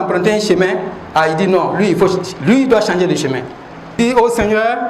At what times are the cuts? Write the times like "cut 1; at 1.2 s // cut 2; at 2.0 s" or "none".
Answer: cut 1; at 4.0 s